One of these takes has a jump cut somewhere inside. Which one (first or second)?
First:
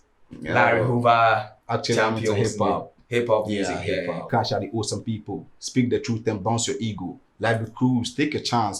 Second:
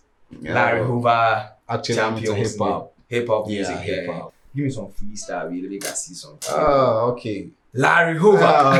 first